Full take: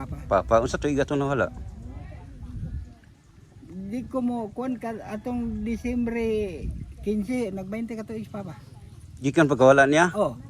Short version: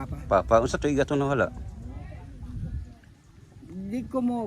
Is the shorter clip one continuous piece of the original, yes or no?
yes